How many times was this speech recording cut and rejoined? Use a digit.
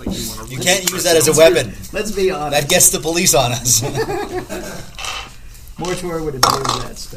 0